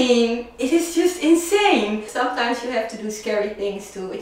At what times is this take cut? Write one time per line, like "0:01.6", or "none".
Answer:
0:02.2